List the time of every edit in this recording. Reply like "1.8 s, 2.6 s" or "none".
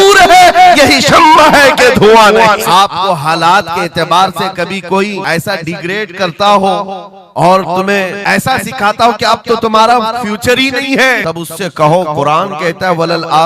2.6 s, 5.2 s, 8.2 s, 11.2 s

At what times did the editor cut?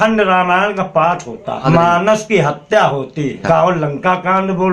1.6 s, 3.4 s

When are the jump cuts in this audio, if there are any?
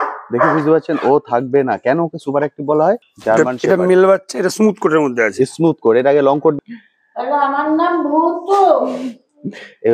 3.1 s, 6.5 s

